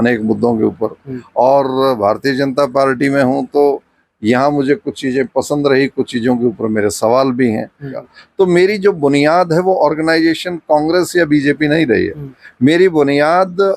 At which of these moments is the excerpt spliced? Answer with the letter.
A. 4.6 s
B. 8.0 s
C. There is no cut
B